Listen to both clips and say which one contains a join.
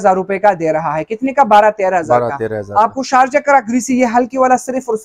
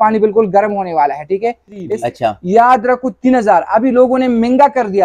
second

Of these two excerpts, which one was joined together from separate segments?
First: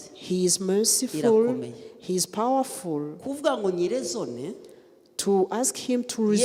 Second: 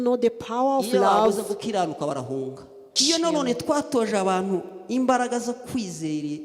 second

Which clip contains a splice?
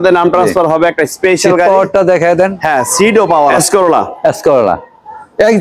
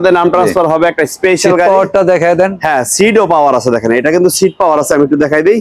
first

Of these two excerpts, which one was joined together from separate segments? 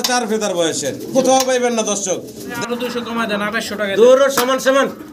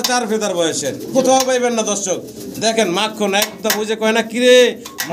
first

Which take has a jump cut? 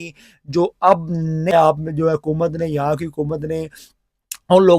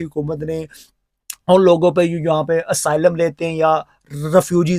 first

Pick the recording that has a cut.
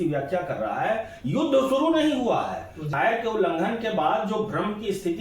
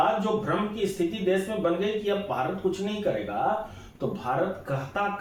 first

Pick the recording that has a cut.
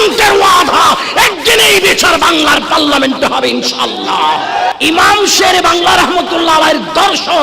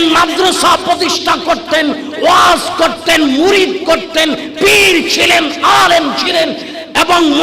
first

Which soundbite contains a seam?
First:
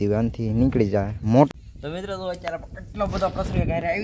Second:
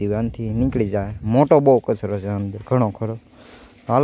first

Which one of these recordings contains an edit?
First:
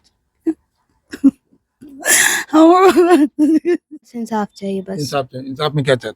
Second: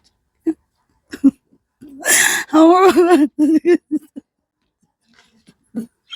first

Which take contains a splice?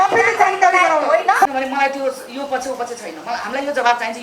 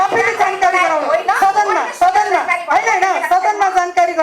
first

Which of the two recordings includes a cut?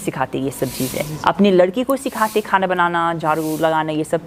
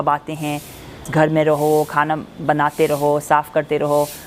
second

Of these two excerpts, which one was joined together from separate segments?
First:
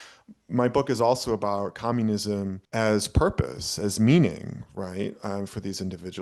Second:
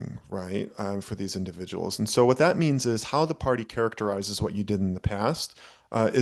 first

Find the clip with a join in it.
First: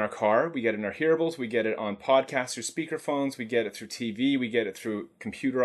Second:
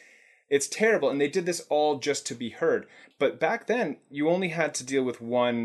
second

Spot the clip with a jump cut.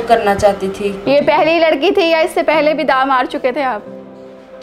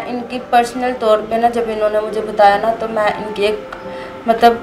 first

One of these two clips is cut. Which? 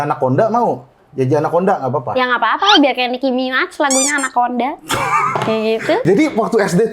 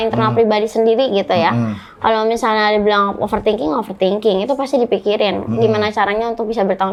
first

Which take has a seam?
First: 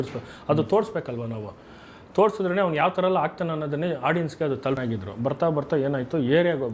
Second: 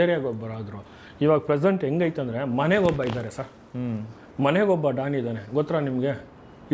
first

